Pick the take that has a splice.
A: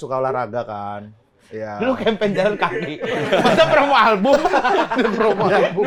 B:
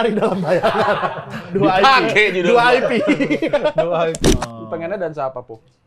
B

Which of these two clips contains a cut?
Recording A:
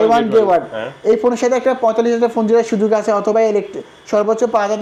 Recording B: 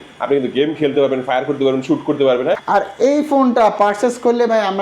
B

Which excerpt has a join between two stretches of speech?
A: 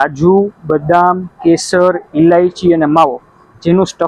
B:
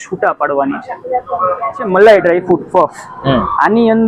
B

